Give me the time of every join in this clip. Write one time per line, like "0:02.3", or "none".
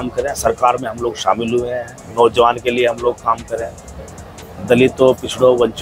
none